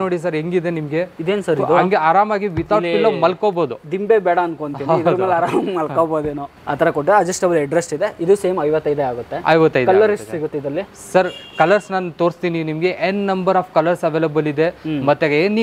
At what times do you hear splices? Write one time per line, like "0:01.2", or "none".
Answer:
none

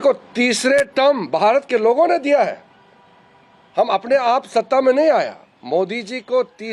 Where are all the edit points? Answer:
none

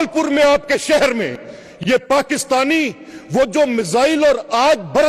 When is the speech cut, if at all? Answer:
none

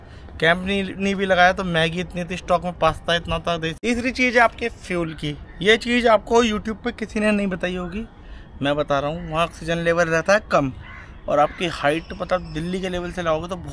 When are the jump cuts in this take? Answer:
0:03.7

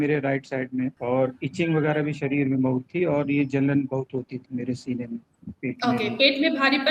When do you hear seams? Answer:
0:01.0

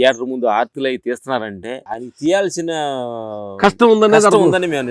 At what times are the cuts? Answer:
0:01.9

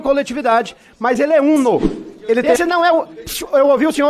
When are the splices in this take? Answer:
0:02.5

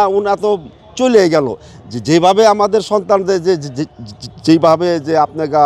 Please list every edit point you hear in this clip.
none

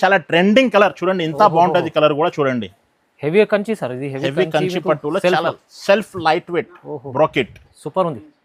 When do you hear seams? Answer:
none

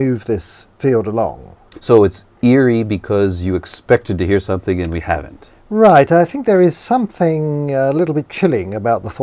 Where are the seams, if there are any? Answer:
none

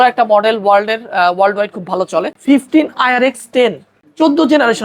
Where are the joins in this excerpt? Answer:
0:02.3
0:03.9

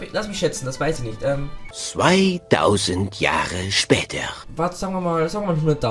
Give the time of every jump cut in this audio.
0:01.2
0:04.4

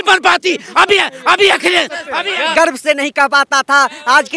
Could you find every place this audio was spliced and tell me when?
0:02.5

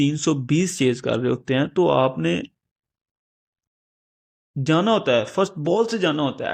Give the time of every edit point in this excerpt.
none

